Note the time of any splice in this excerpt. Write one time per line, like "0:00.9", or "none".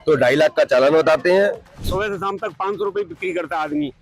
0:01.9